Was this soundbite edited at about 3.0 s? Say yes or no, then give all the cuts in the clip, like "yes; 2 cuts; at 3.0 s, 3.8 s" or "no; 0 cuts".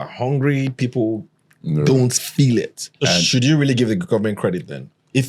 yes; 1 cut; at 3.0 s